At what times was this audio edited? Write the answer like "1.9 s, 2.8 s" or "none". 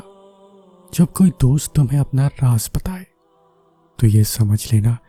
none